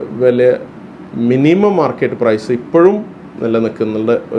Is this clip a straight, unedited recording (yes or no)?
yes